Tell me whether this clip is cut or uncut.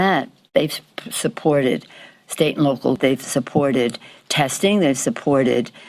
cut